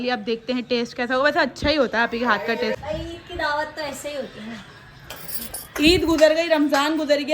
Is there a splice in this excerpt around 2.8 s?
yes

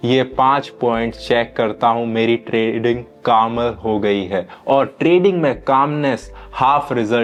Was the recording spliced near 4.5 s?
no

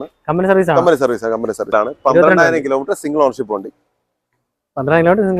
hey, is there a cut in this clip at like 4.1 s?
no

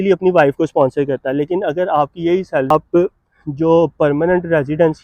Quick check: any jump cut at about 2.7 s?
yes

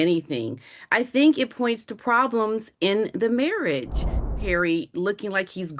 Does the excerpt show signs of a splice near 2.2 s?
no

